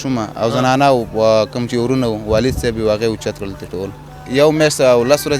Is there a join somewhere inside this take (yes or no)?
yes